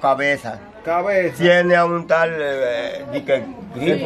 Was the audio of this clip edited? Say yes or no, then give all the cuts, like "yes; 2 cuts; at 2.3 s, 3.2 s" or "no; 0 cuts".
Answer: no; 0 cuts